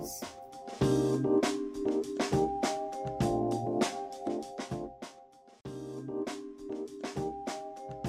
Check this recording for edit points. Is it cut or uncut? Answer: cut